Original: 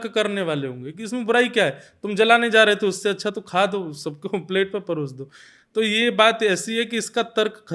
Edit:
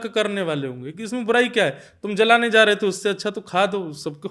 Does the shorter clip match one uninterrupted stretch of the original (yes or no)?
yes